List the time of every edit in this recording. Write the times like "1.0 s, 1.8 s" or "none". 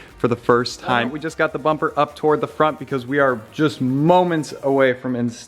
1.1 s